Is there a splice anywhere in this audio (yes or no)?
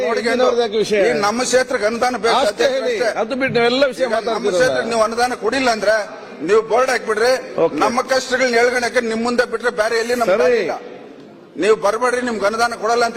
no